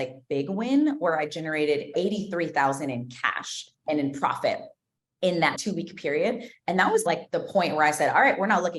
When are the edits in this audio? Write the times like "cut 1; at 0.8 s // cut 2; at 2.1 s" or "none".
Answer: cut 1; at 1.9 s // cut 2; at 3.8 s // cut 3; at 5.5 s // cut 4; at 7.1 s